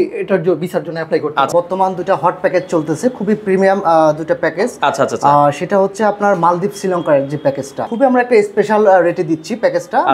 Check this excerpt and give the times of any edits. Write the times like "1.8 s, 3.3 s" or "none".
1.5 s, 7.8 s